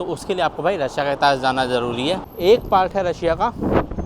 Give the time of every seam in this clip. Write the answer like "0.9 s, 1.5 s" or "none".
2.3 s